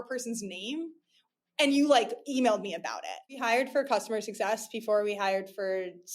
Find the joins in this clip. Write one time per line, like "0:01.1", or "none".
0:03.4